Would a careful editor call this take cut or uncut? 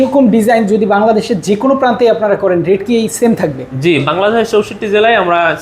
uncut